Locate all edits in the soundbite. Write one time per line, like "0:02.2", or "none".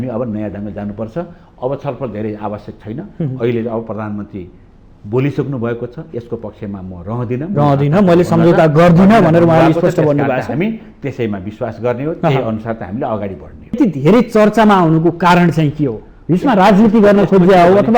0:13.8